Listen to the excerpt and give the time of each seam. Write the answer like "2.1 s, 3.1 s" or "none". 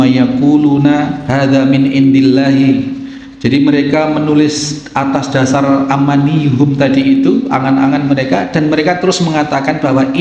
1.2 s

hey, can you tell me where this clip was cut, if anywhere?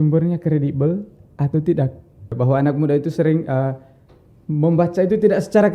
2.3 s

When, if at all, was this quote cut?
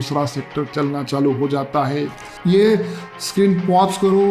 2.1 s

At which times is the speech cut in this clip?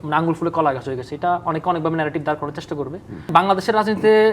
3.3 s

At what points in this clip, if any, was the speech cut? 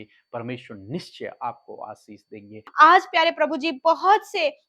2.6 s

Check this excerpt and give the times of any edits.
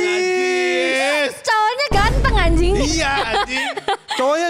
none

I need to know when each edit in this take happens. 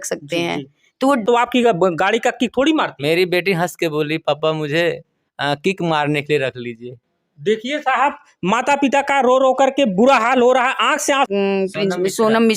1.2 s, 11.3 s

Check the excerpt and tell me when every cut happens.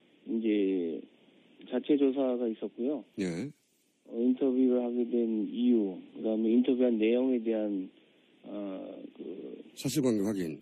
6.9 s

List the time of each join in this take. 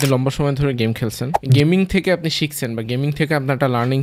1.3 s

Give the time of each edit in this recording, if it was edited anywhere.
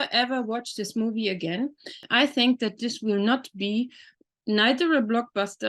2.0 s

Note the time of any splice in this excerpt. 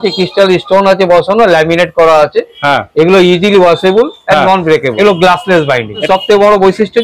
4.9 s, 6.1 s

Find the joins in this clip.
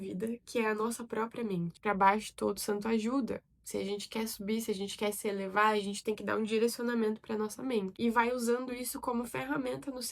1.7 s, 7.9 s

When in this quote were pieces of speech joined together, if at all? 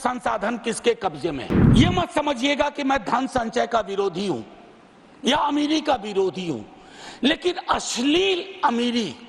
1.6 s

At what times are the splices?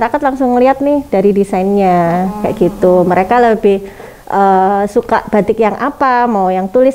none

